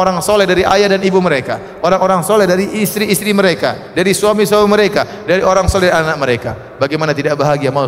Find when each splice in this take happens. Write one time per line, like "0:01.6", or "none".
none